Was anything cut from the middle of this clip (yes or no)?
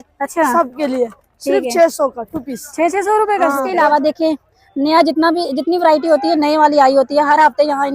yes